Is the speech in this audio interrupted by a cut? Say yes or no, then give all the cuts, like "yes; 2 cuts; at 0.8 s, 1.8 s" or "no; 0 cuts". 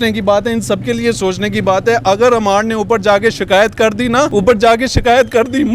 yes; 1 cut; at 4.3 s